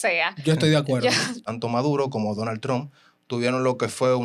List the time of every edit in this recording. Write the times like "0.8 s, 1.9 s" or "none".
1.4 s